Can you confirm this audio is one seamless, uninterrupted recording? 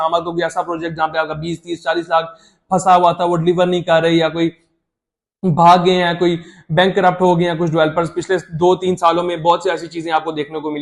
yes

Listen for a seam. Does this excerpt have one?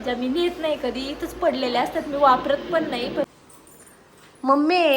yes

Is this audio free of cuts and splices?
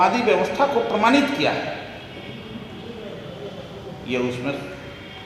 yes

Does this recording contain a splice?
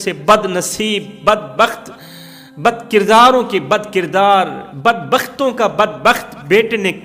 no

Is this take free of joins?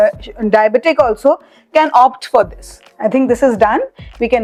yes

